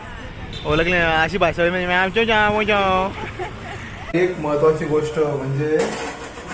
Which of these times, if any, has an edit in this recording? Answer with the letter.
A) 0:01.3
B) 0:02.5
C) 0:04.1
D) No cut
C